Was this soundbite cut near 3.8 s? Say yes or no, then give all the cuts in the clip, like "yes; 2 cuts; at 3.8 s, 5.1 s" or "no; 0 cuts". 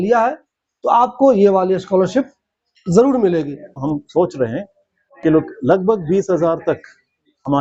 yes; 1 cut; at 3.8 s